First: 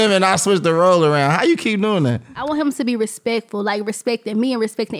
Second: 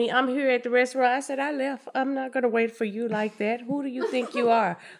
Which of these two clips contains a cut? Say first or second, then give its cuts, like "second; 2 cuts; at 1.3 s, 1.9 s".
first; 1 cut; at 2.4 s